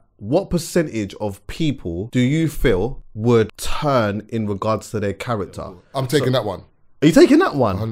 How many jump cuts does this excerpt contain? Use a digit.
4